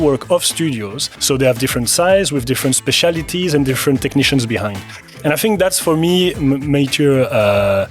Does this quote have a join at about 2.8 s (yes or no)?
no